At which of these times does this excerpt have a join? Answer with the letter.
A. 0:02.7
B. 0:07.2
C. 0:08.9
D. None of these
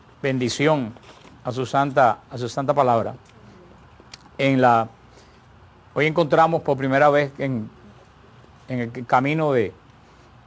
C